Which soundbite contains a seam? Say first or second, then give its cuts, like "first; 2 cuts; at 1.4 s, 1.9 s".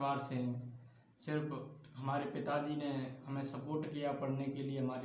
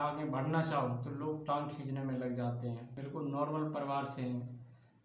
second; 1 cut; at 2.9 s